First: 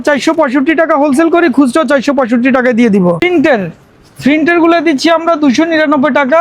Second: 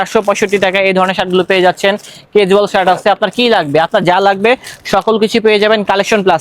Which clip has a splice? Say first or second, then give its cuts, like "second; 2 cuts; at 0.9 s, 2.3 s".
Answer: first; 1 cut; at 3.2 s